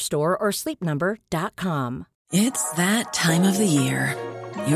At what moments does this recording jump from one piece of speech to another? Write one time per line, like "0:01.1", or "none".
0:02.1